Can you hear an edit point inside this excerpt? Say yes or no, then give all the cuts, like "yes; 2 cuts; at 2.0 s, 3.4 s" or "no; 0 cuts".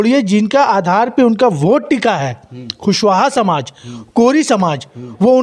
no; 0 cuts